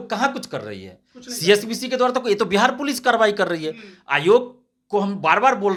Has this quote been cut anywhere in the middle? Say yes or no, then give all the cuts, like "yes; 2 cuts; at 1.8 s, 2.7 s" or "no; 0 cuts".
no; 0 cuts